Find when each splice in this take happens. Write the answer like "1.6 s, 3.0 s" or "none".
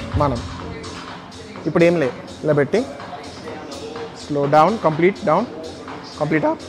none